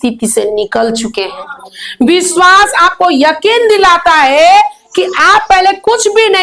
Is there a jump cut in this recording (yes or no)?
no